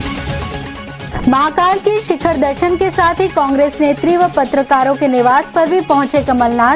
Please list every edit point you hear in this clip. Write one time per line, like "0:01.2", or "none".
0:01.0